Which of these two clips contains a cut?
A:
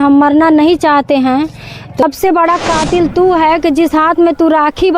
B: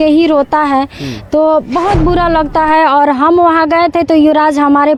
A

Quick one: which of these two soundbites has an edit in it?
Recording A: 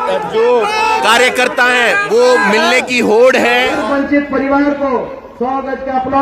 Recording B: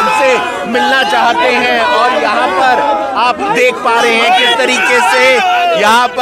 A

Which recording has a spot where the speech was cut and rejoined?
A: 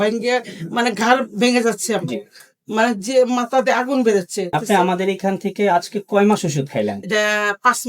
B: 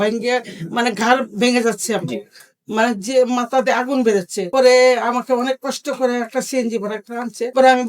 A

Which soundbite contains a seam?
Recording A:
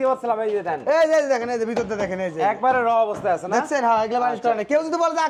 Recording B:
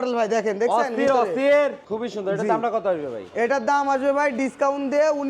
B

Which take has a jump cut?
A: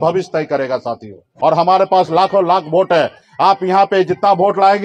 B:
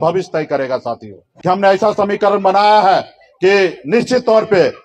B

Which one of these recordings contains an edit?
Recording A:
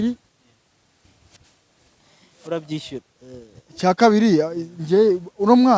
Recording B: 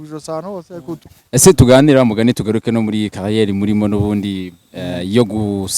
B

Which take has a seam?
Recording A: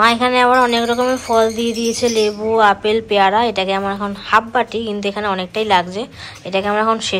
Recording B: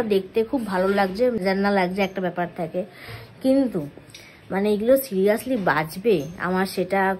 B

